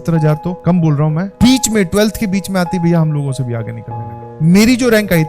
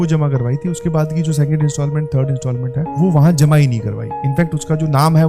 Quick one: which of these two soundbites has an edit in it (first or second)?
first